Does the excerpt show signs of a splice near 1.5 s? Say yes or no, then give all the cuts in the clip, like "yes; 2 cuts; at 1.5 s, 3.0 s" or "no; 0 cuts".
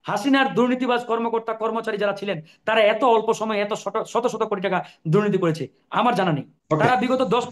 no; 1 cut; at 6.5 s